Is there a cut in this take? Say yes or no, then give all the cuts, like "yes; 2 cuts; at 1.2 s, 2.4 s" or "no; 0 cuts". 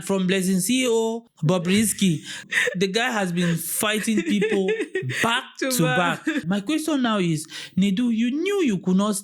yes; 3 cuts; at 1.3 s, 2.5 s, 6.4 s